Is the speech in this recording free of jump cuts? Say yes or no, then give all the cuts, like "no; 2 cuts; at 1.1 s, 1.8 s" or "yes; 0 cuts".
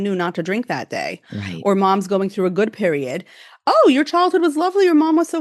yes; 0 cuts